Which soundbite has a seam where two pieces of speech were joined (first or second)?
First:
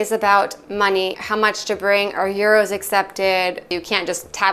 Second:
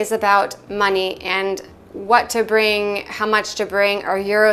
first